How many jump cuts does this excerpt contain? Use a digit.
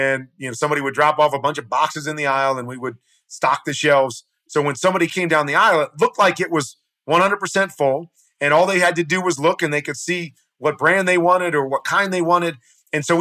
1